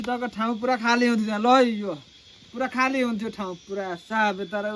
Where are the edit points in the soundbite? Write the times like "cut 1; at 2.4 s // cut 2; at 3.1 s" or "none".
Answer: none